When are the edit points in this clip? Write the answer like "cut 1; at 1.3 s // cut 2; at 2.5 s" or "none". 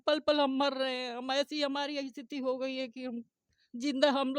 none